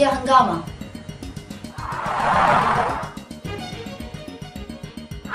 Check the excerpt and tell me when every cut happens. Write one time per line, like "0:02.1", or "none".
none